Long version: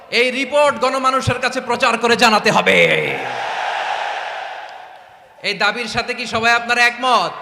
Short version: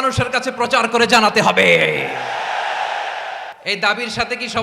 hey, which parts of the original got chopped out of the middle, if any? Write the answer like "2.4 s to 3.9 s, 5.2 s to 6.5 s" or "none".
4.6 s to 5.3 s